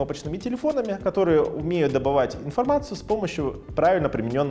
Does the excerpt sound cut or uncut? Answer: uncut